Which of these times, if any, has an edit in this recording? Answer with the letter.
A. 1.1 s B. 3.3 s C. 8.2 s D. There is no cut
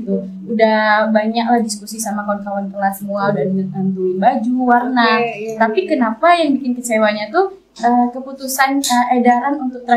D